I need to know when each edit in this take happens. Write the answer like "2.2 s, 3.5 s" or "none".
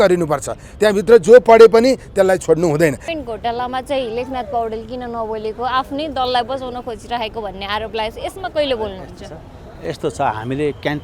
3.1 s